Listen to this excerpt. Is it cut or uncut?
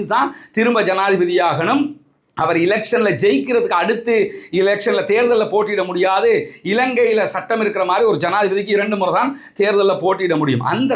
uncut